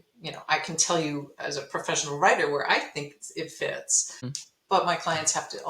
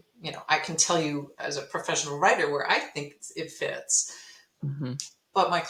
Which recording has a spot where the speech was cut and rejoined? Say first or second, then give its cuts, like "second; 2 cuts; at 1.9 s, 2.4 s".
first; 1 cut; at 4.2 s